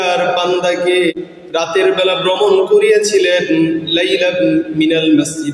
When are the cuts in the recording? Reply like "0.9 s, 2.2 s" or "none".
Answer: 1.1 s